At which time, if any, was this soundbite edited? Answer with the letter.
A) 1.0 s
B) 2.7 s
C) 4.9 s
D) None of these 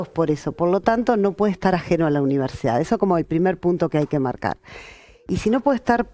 D